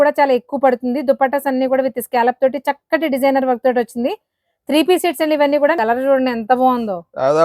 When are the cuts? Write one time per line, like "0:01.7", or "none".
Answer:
0:05.8

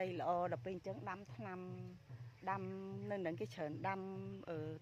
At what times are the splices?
none

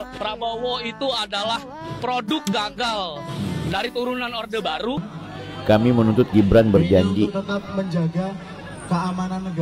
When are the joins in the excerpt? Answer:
0:05.0

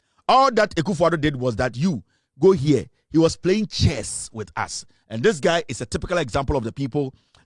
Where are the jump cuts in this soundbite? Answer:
none

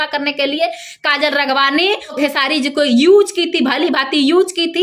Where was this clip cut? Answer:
0:02.2

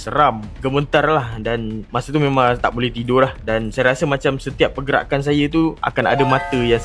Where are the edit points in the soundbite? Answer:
none

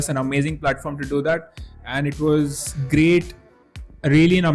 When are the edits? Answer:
none

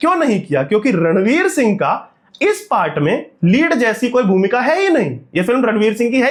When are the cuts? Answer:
none

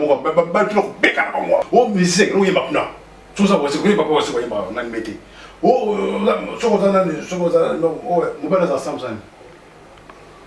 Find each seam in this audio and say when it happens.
0:01.6

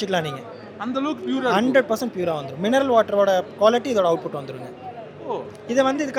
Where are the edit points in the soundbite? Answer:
none

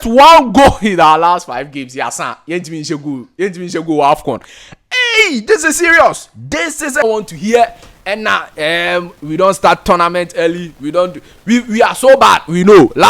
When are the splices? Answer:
0:07.0

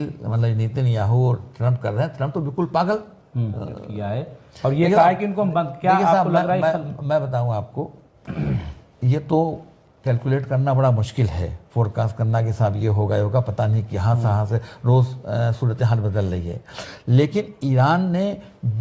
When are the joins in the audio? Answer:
0:03.9

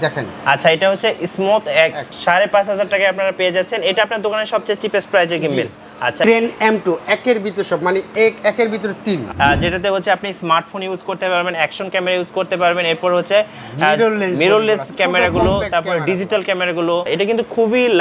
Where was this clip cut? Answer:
0:02.1
0:06.2
0:09.2
0:17.1

